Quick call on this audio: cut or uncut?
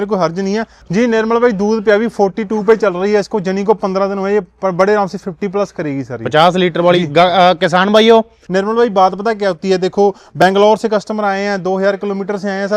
cut